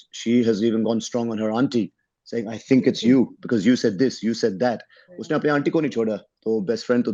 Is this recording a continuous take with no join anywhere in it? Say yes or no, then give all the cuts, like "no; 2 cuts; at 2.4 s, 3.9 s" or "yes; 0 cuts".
yes; 0 cuts